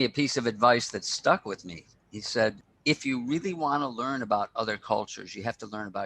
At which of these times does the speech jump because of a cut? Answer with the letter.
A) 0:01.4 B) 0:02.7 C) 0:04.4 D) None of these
B